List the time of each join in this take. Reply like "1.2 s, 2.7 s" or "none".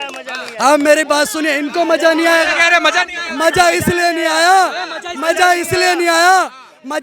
none